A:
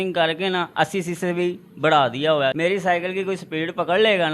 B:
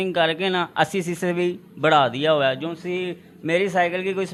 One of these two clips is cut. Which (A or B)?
A